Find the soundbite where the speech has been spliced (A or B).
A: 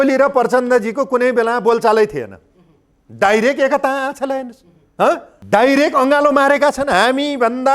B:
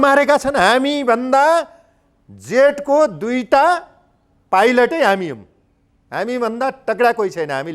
A